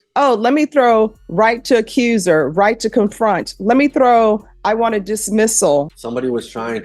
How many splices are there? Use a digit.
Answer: 1